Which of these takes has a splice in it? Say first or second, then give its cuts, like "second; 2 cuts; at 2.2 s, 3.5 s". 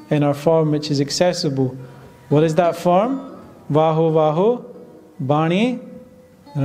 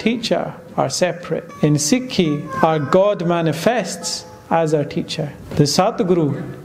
second; 3 cuts; at 1.5 s, 2.5 s, 5.4 s